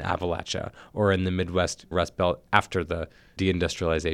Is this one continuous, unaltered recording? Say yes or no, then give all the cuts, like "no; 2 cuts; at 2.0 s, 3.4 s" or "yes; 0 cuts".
no; 2 cuts; at 1.9 s, 3.2 s